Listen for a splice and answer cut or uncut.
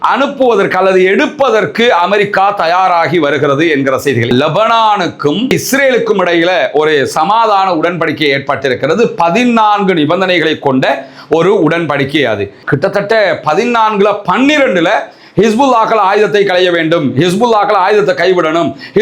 cut